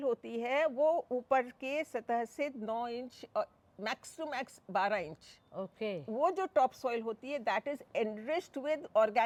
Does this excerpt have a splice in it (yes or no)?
no